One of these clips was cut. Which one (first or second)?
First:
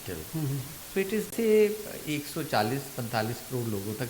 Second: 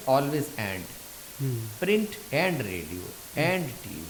first